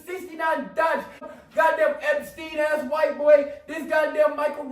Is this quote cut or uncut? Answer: cut